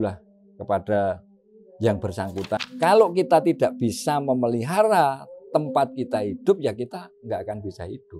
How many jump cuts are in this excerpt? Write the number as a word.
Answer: one